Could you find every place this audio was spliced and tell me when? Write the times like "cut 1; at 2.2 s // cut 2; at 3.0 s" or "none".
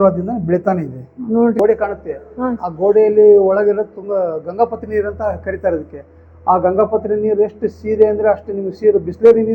cut 1; at 1.6 s